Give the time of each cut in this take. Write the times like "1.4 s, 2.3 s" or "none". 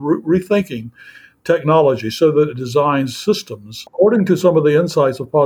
3.9 s